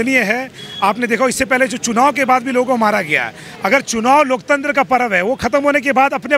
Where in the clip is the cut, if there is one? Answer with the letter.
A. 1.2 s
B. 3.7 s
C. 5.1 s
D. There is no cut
D